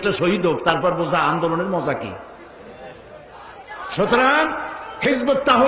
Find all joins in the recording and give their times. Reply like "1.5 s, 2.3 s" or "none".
3.7 s